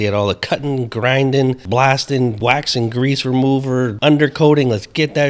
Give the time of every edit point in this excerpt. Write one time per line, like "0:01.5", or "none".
0:01.6
0:02.4
0:03.9